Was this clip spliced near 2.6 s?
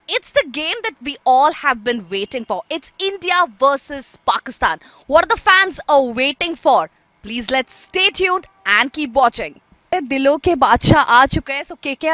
no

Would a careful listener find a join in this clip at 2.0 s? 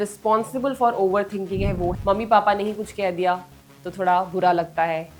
yes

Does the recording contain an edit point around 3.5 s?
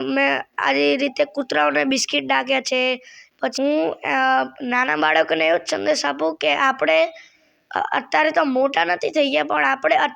yes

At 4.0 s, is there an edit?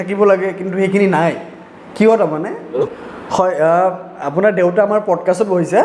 no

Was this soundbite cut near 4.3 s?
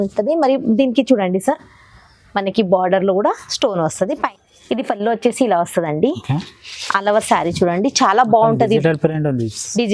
yes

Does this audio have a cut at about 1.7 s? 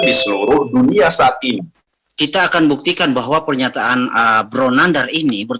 yes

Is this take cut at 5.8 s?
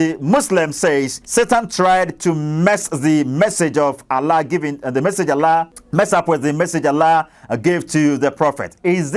yes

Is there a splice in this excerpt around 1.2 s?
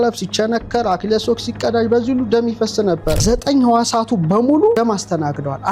no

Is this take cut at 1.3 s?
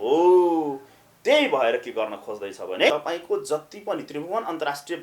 no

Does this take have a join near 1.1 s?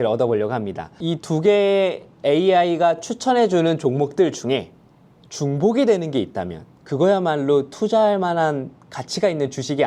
yes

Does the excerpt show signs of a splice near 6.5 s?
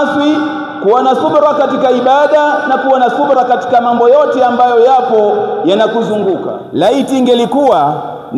yes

